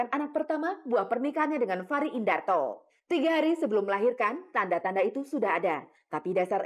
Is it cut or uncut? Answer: uncut